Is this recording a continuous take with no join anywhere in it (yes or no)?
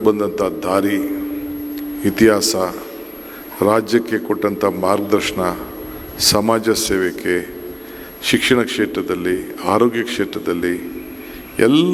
yes